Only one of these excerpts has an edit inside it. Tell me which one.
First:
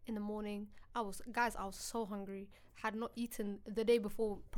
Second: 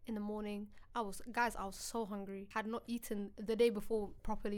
second; 1 cut; at 2.4 s

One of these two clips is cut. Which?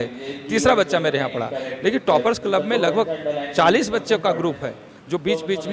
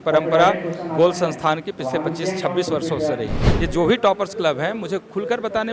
second; 1 cut; at 3.5 s

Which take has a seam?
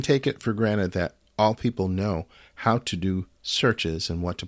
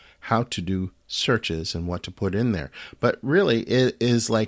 first; 1 cut; at 1.2 s

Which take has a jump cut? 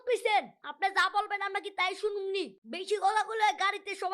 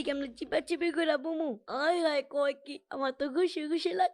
first; 1 cut; at 2.6 s

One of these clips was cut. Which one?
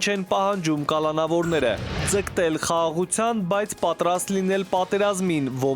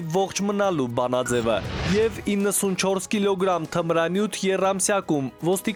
first; 1 cut; at 2.0 s

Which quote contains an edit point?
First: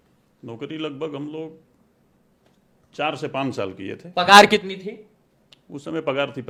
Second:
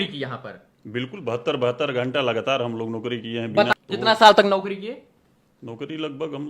second; 1 cut; at 3.7 s

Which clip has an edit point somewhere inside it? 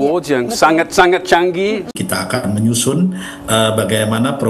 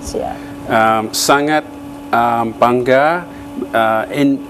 first; 1 cut; at 1.9 s

